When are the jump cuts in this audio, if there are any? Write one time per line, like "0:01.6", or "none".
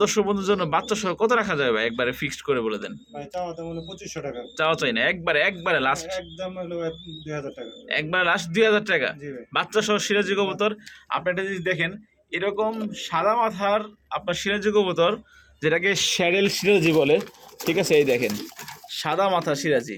none

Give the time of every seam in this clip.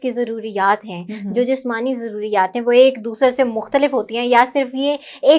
none

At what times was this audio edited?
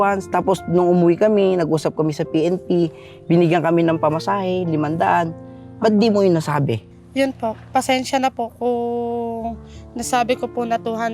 0:06.8

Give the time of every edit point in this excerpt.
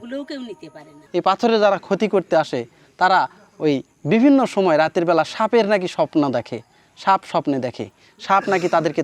0:01.0

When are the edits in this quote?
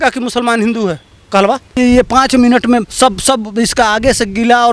0:01.8
0:02.9

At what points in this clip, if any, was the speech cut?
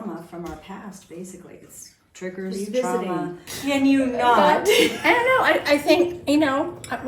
0:03.5

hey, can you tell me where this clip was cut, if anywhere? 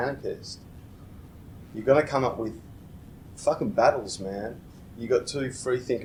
none

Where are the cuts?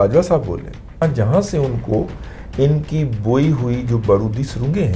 0:01.0

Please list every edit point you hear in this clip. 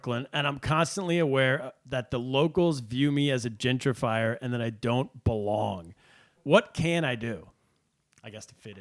0:06.4

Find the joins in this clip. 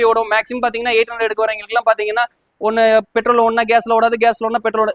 none

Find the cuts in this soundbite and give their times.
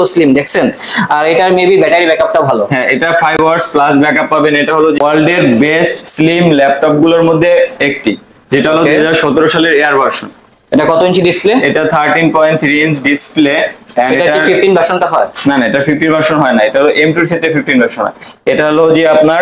none

